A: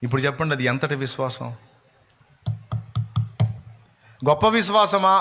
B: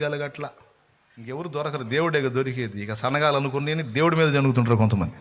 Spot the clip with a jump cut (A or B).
B